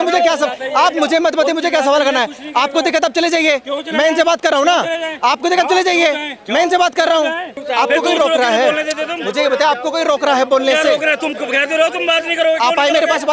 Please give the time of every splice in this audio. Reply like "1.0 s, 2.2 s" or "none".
7.5 s